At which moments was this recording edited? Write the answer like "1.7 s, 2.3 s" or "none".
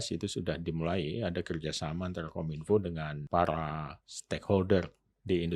3.1 s